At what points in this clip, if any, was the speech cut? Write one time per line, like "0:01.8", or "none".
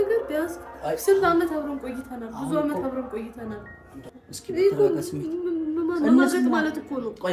0:04.1